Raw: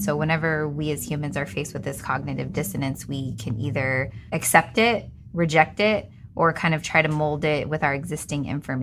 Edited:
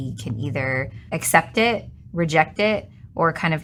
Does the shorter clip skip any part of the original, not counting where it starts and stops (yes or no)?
no